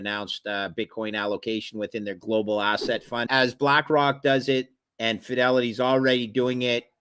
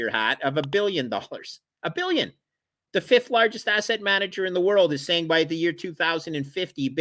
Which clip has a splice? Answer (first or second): first